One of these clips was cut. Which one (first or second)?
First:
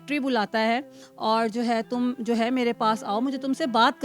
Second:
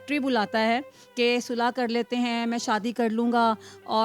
first